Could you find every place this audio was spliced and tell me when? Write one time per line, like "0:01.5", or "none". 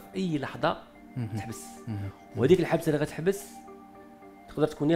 0:01.0